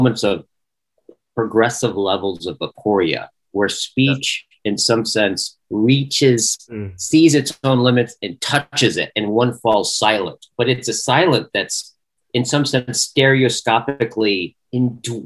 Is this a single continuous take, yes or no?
yes